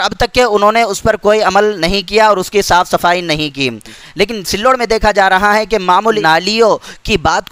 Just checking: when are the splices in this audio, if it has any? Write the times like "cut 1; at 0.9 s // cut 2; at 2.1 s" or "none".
cut 1; at 4.2 s // cut 2; at 6.2 s